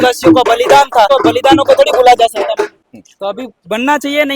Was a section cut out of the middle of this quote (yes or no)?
yes